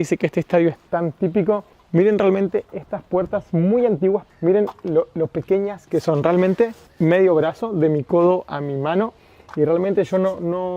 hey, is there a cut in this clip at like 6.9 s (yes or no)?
yes